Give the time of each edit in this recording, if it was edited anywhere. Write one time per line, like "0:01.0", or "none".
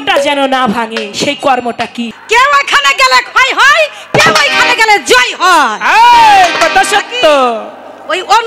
0:02.1